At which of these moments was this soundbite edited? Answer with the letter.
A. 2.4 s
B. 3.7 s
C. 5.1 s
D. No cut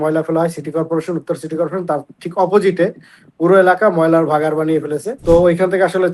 C